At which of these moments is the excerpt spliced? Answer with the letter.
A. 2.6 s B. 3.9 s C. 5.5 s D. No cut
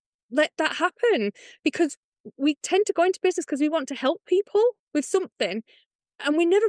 A